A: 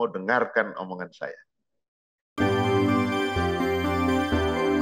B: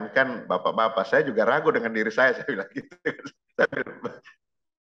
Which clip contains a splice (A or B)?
A